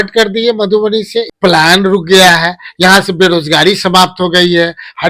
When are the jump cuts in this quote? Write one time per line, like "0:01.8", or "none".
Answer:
0:01.3